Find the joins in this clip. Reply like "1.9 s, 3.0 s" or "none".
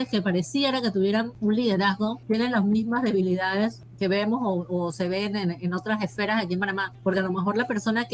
1.3 s, 2.2 s, 3.8 s, 6.9 s